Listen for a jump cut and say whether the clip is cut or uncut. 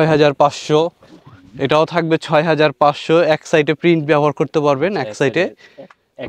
uncut